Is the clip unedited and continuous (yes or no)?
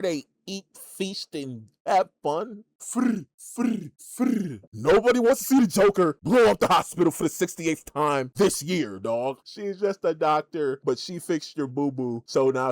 no